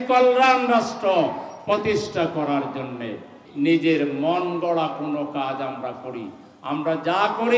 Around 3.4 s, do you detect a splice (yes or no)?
yes